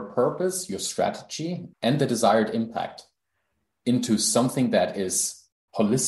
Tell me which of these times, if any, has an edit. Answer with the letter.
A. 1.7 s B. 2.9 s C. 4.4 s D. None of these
A